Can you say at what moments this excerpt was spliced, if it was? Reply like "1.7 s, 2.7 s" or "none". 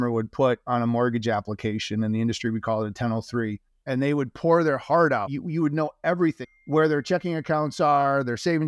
3.7 s, 5.3 s, 6.4 s